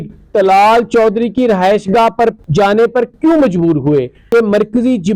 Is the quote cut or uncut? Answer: cut